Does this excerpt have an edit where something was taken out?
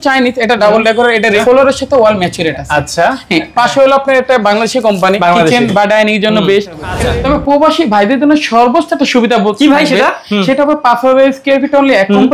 yes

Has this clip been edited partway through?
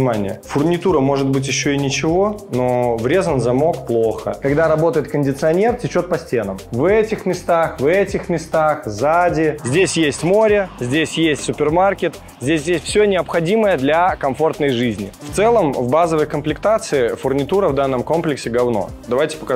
yes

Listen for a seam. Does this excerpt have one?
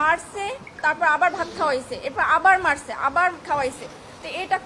no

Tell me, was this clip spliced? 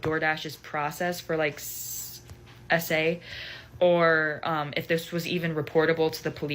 yes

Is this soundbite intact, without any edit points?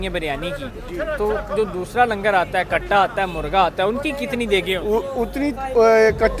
yes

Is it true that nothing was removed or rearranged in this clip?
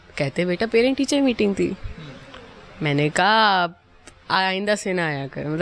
yes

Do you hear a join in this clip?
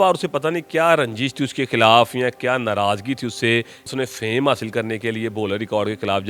yes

